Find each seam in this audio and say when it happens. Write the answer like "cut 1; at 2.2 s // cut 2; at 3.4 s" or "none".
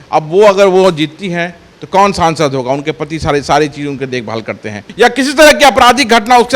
cut 1; at 4.8 s